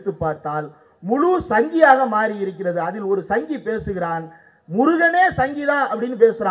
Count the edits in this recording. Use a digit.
0